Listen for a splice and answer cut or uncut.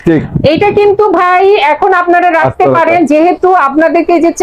uncut